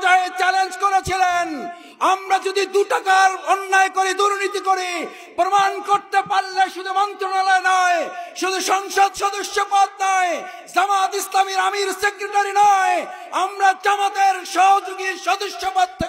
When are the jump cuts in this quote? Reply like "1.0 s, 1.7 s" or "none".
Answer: none